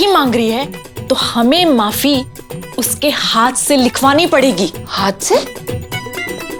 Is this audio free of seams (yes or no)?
yes